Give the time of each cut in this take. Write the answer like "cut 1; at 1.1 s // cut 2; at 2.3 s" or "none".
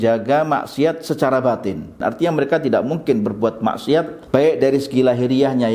cut 1; at 2.0 s // cut 2; at 4.2 s